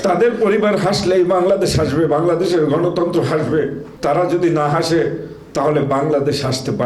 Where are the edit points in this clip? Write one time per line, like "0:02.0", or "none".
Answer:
0:03.9